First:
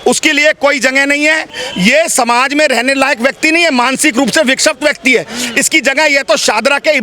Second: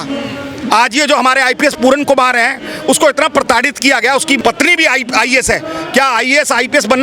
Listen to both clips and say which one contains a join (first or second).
first